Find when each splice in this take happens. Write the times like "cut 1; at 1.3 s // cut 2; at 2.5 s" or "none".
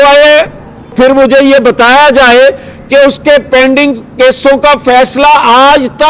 cut 1; at 0.9 s